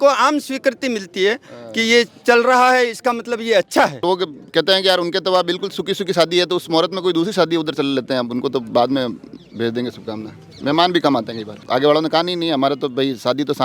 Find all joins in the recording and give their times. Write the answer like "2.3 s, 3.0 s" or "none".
4.0 s, 11.6 s

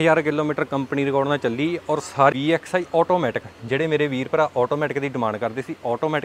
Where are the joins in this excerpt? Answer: 2.3 s

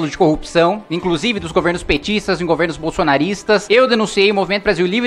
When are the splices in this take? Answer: none

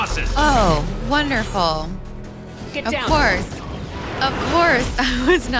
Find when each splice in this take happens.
none

